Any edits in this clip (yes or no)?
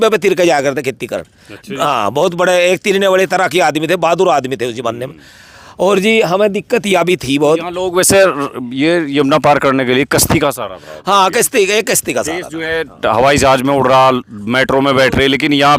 no